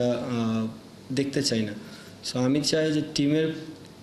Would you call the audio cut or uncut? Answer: uncut